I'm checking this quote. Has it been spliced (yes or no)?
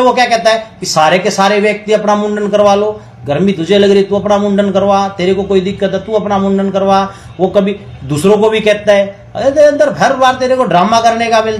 no